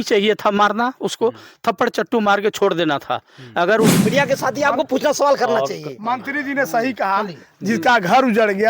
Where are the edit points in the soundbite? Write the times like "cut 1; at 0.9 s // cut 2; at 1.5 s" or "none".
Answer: cut 1; at 3.9 s